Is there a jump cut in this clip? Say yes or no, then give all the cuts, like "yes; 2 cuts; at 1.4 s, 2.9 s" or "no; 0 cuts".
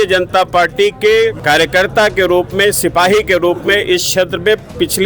yes; 1 cut; at 1.4 s